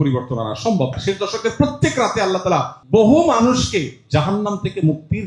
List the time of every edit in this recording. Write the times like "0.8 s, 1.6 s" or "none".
0.9 s, 2.8 s